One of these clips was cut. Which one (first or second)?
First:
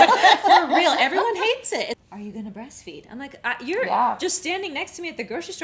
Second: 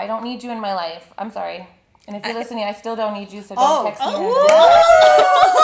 first